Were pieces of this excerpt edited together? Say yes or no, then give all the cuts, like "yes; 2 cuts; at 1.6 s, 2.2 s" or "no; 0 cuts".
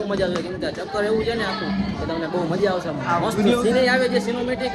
no; 0 cuts